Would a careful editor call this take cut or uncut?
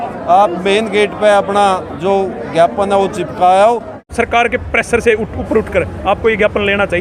cut